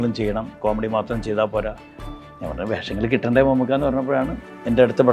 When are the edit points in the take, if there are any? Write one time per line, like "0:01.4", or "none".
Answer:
none